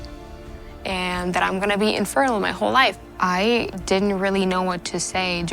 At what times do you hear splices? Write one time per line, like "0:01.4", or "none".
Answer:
0:03.0

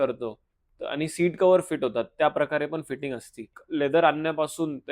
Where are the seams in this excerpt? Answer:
0:03.6

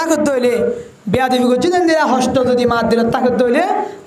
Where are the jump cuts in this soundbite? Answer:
none

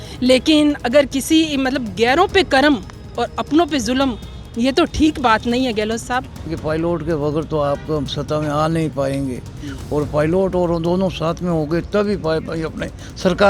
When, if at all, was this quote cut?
0:06.5

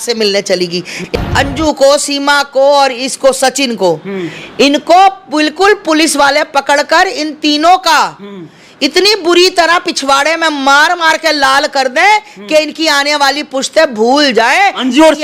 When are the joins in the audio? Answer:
0:01.0

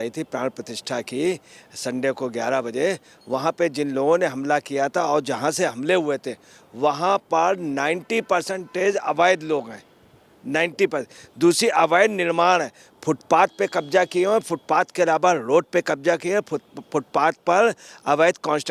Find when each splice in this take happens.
none

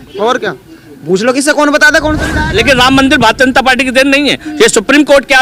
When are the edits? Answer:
0:02.5

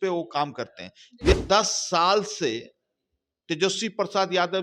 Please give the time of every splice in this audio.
0:01.3

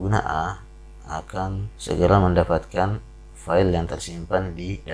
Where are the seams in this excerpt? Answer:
0:01.7

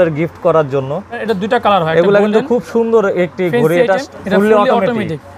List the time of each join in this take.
0:01.2
0:04.0

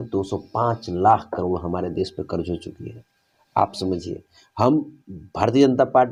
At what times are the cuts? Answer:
none

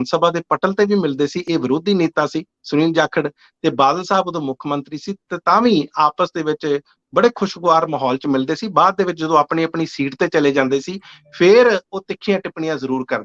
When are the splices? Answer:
none

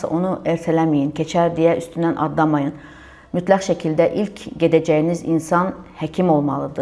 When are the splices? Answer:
none

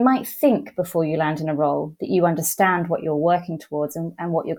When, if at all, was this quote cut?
none

